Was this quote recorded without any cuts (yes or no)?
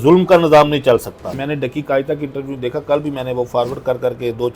no